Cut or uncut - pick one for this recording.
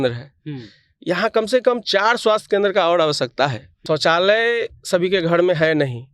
cut